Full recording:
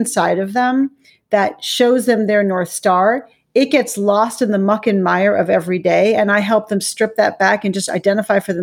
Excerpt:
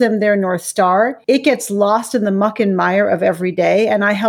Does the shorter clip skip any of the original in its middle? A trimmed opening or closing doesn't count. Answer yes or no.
yes